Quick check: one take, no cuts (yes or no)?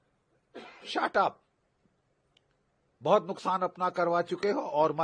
yes